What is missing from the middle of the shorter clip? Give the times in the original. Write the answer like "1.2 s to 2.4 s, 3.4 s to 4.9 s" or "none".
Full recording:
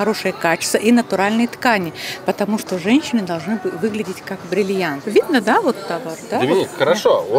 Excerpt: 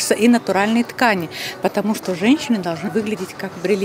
3.5 s to 3.7 s

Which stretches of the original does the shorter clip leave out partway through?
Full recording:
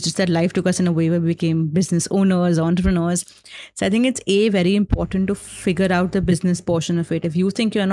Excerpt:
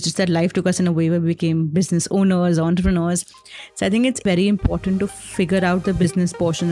4.2 s to 4.5 s

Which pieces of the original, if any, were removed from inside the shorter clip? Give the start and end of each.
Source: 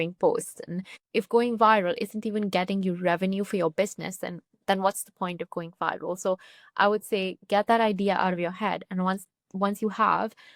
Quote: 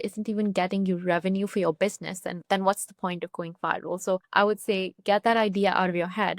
4.3 s to 4.5 s, 6.4 s to 6.7 s

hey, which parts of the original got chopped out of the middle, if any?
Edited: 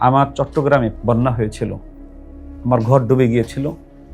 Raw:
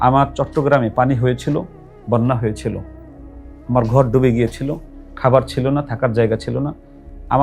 0.9 s to 2.0 s

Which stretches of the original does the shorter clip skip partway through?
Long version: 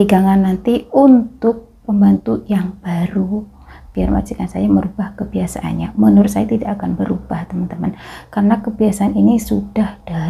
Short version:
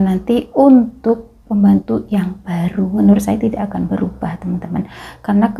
3.4 s to 6.1 s

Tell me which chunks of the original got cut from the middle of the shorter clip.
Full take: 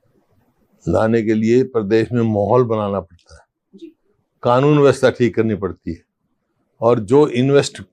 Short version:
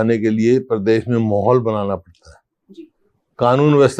none

